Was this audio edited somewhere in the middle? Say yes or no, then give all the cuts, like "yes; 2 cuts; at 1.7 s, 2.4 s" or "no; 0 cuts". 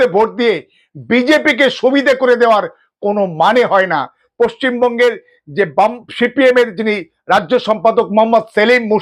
yes; 1 cut; at 4.2 s